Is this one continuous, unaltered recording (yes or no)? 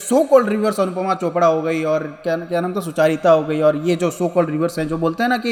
yes